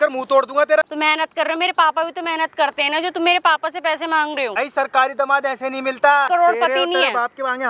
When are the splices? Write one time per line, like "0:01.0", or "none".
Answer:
0:00.9
0:04.6
0:06.3

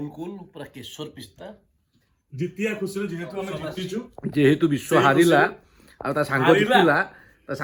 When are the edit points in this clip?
none

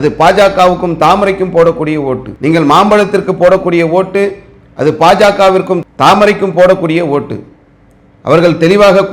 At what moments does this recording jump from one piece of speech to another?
0:02.3

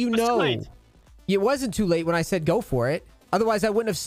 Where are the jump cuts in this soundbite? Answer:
0:03.1

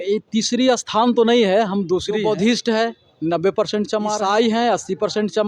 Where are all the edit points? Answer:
0:02.1
0:04.2

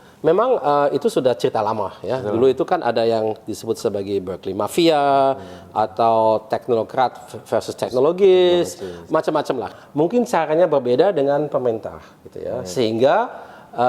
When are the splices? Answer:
0:09.7

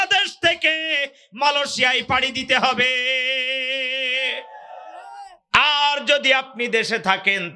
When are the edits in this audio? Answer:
none

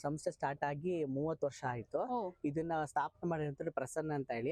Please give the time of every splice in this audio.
none

